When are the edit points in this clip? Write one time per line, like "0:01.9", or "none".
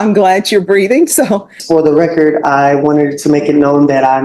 0:01.6